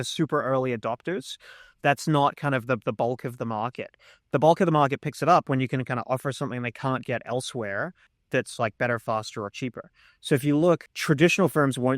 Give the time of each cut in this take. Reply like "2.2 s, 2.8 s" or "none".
8.2 s, 10.9 s